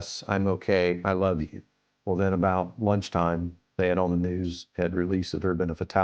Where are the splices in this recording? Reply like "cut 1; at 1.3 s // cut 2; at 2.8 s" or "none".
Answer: cut 1; at 3.6 s